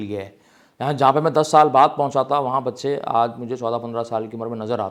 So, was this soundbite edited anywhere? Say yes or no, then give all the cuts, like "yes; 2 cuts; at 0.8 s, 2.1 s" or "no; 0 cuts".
no; 0 cuts